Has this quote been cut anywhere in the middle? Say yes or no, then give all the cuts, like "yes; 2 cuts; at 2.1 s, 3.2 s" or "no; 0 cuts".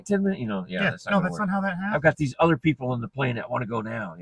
no; 0 cuts